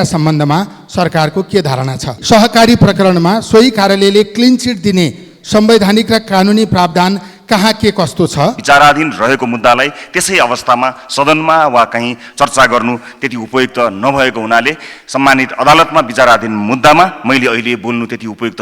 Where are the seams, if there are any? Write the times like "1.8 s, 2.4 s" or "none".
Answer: 2.1 s, 8.6 s